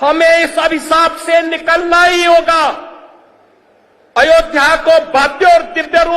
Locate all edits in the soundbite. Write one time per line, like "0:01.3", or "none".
none